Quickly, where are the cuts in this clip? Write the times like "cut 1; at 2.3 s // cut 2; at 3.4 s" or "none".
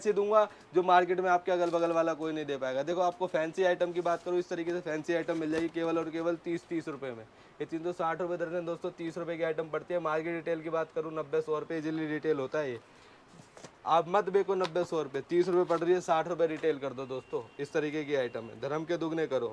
none